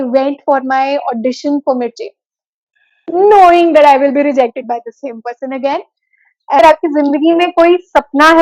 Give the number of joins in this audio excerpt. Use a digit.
1